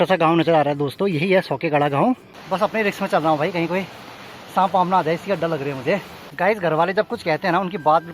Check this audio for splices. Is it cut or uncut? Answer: cut